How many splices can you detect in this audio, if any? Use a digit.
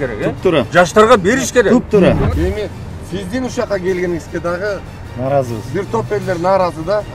1